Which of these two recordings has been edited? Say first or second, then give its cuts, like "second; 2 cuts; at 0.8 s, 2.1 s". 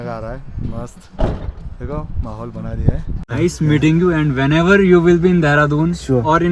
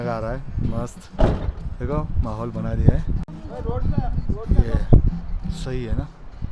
first; 1 cut; at 3.3 s